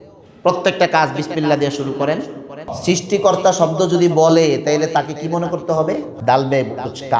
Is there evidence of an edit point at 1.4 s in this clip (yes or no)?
no